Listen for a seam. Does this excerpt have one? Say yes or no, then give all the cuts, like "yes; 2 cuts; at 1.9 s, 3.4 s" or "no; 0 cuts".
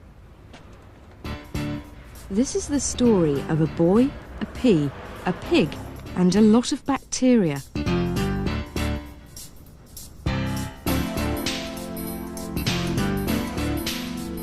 yes; 1 cut; at 12.3 s